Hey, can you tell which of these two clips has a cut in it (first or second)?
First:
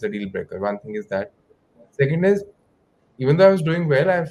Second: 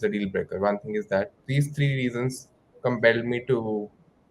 second